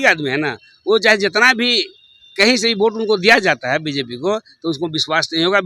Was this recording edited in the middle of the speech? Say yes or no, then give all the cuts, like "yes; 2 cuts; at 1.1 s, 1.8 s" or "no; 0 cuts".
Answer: no; 0 cuts